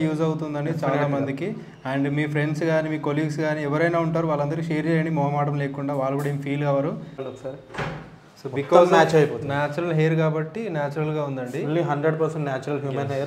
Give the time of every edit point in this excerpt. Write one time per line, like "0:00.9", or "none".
0:07.3